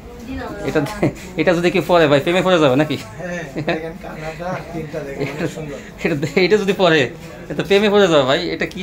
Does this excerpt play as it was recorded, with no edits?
yes; 0 cuts

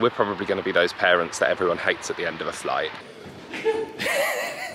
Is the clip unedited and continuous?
no; 1 cut; at 3.0 s

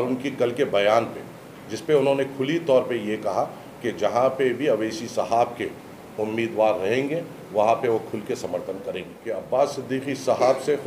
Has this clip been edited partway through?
yes; 1 cut; at 9.1 s

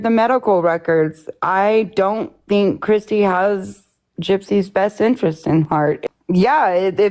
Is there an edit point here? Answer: yes; 1 cut; at 6.0 s

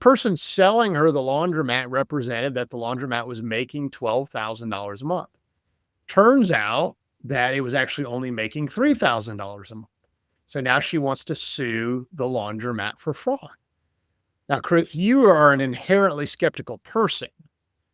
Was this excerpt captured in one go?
yes; 0 cuts

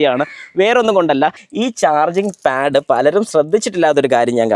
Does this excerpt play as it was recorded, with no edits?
no; 1 cut; at 1.4 s

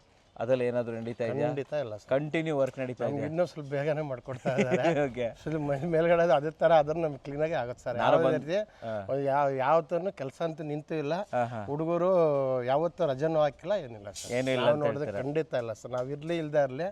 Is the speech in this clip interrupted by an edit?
no; 0 cuts

